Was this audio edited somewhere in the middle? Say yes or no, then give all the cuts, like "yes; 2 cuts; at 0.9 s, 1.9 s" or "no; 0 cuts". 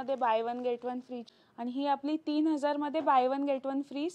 yes; 1 cut; at 1.2 s